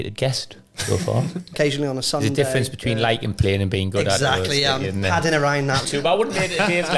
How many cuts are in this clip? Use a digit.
2